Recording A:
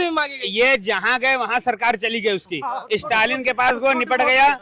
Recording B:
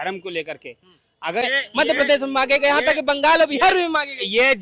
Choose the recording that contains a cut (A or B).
B